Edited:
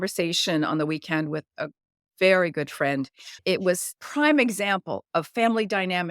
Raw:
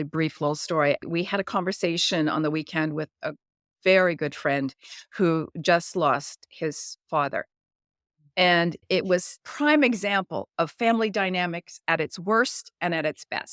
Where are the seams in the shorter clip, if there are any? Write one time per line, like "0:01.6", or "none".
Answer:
0:03.4